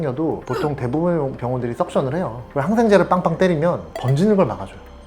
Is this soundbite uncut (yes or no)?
no